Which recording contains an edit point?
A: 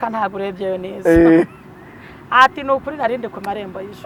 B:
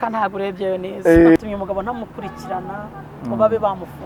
B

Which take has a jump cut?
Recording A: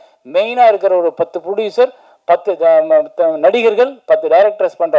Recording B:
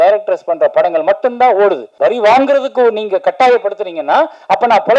B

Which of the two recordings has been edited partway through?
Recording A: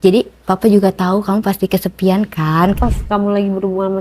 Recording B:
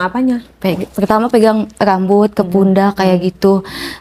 A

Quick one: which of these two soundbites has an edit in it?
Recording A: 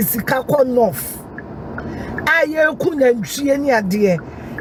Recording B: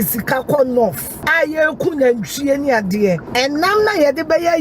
B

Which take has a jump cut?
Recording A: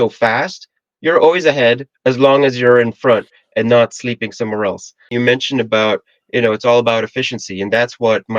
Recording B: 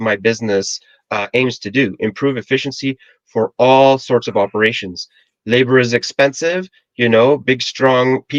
A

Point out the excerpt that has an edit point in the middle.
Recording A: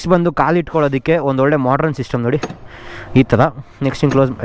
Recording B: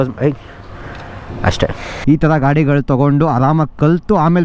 B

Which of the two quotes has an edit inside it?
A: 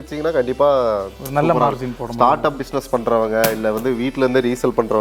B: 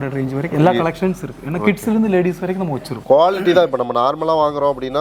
B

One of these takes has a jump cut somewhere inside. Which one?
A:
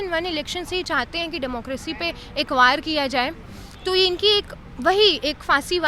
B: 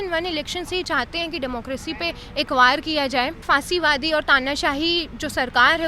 B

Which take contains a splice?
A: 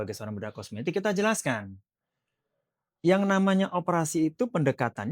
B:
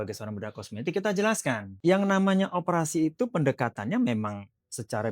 B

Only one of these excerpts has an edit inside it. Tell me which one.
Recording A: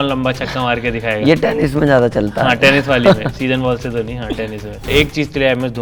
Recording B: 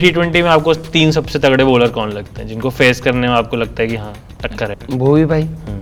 A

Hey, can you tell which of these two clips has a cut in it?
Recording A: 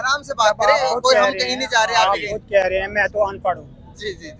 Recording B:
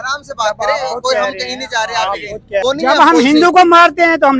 B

